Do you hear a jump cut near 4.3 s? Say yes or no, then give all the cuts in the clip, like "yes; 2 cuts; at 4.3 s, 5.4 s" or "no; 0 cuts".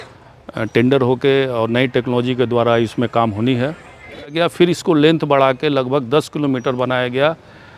yes; 1 cut; at 4.3 s